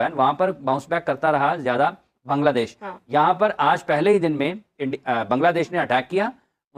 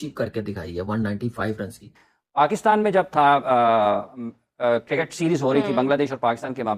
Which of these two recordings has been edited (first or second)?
second